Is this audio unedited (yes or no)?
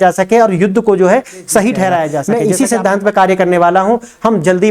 no